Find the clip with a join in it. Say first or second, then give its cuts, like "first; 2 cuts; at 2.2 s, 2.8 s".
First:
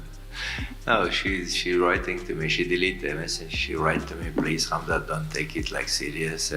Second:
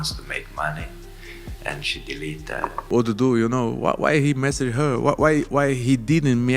second; 1 cut; at 2.9 s